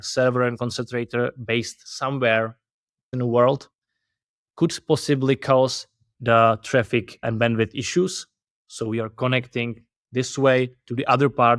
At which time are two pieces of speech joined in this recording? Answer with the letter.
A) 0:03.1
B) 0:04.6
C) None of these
A